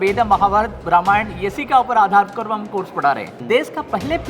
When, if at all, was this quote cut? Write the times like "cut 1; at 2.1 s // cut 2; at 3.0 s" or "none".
cut 1; at 3.3 s